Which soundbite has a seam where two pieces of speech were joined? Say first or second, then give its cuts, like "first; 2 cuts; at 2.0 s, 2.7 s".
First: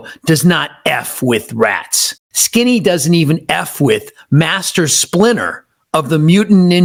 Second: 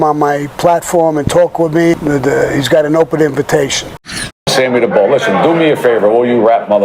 second; 2 cuts; at 2.0 s, 4.5 s